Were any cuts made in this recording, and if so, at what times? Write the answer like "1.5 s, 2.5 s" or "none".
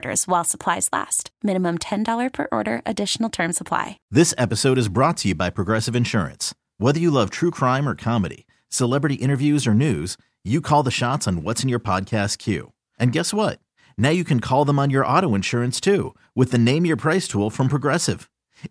4.0 s